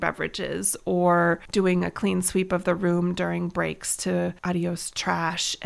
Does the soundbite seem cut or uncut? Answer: cut